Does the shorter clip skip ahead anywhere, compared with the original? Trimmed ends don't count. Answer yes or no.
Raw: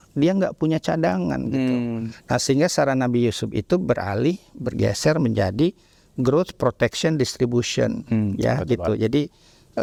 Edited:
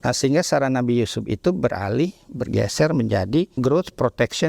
yes